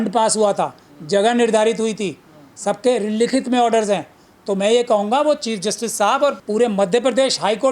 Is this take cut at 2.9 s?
no; 1 cut; at 6.4 s

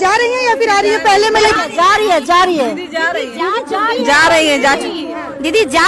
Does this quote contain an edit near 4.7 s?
no; 1 cut; at 1.5 s

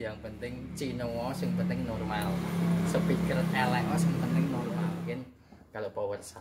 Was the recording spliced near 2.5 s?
no; 1 cut; at 5.0 s

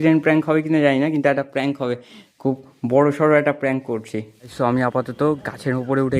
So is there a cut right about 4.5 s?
yes; 1 cut; at 4.5 s

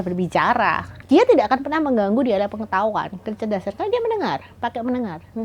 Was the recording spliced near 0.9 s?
yes; 1 cut; at 0.9 s

